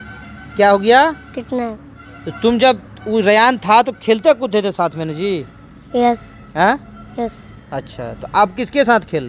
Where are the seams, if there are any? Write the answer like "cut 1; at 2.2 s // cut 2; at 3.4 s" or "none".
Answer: none